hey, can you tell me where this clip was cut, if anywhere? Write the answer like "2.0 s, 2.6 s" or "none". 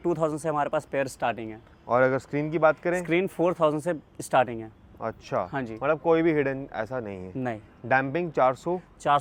none